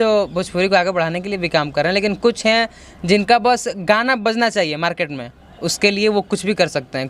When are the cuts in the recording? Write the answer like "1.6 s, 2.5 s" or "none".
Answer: none

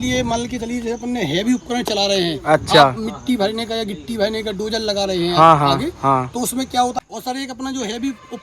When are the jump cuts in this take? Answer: 6.9 s

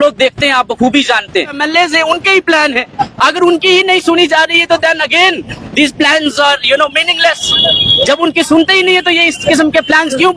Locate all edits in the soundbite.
1.6 s

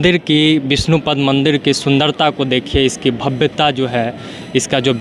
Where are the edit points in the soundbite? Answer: none

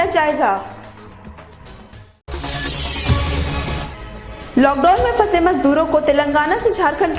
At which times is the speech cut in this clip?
none

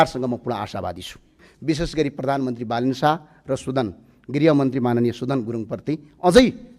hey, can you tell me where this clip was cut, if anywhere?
1.5 s

